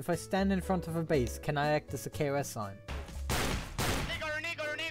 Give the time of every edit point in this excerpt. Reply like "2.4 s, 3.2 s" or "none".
2.8 s